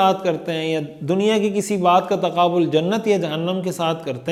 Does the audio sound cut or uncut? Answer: uncut